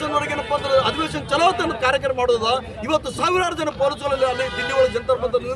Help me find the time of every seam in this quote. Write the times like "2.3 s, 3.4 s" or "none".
none